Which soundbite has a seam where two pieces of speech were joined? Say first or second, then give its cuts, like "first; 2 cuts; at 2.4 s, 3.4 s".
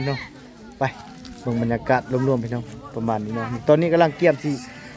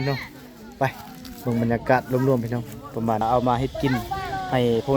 second; 1 cut; at 3.2 s